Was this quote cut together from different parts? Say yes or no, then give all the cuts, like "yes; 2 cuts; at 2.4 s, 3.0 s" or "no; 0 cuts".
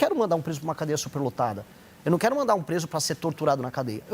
no; 0 cuts